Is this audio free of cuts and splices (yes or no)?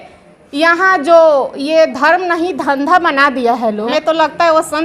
no